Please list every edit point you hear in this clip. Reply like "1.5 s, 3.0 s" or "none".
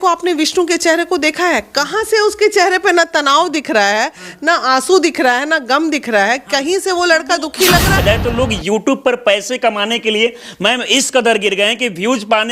8.0 s